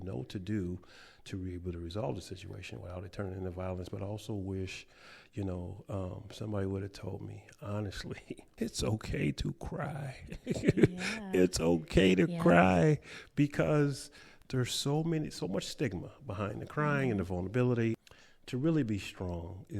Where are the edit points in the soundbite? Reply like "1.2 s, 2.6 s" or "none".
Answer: 8.5 s, 18.0 s